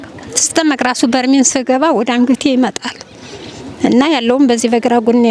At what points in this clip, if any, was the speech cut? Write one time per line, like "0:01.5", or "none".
none